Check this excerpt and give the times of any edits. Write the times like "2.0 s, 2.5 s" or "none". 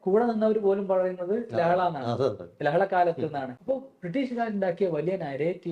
3.5 s